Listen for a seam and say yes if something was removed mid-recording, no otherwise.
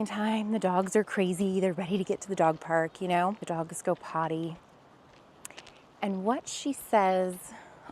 yes